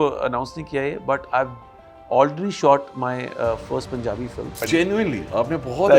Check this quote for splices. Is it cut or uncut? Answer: cut